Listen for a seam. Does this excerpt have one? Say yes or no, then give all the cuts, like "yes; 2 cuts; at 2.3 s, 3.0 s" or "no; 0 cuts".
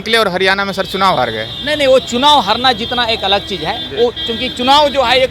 no; 0 cuts